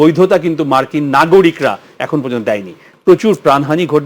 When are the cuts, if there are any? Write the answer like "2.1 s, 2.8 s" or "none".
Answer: 2.9 s